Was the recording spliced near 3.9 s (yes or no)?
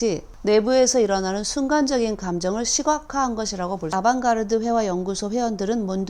yes